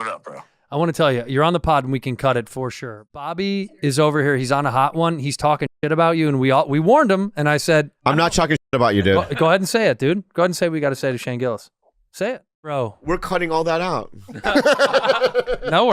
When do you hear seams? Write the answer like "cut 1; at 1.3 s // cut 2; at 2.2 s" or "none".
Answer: cut 1; at 3.2 s // cut 2; at 12.7 s